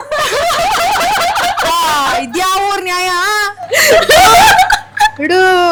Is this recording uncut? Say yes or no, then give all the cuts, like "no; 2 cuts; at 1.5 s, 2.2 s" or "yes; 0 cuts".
yes; 0 cuts